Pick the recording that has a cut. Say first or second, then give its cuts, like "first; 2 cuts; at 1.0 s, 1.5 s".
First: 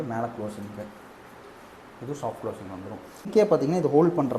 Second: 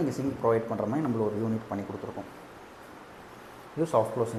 first; 1 cut; at 3.3 s